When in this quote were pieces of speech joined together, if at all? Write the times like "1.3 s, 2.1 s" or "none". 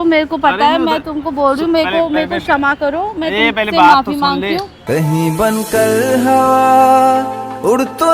none